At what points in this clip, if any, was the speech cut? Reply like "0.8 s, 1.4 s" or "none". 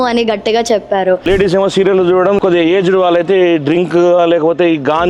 1.2 s, 2.4 s